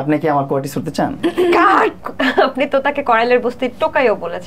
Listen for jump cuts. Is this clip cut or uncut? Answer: cut